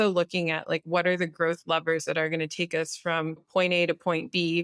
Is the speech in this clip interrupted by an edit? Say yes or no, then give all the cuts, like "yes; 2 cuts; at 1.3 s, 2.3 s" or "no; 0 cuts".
yes; 1 cut; at 3.5 s